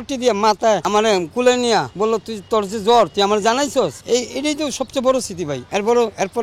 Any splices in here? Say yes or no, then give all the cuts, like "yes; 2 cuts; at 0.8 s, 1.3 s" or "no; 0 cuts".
yes; 4 cuts; at 0.8 s, 1.9 s, 4.0 s, 5.6 s